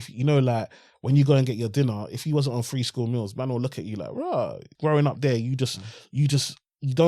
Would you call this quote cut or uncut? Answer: cut